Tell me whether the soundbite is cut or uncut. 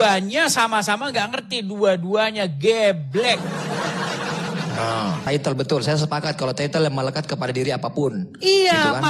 cut